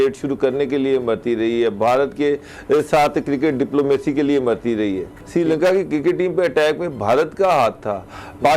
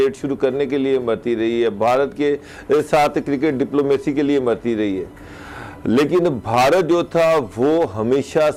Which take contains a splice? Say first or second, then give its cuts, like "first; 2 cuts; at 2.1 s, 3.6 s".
first; 1 cut; at 5.1 s